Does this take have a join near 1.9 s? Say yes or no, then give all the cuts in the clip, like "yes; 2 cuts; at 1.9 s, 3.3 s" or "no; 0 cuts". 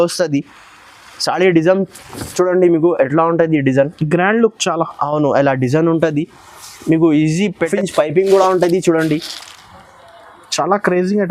no; 1 cut; at 7.7 s